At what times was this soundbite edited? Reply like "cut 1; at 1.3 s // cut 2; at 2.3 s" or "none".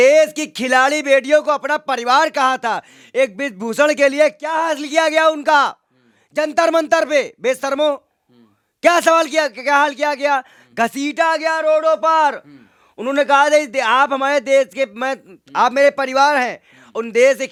none